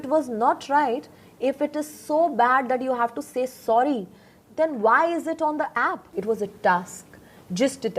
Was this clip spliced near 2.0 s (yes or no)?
no